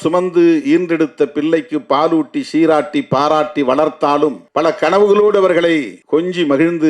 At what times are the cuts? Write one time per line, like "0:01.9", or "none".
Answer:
0:04.4
0:05.9